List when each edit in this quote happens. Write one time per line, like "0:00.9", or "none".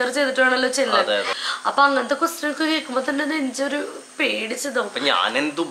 0:01.4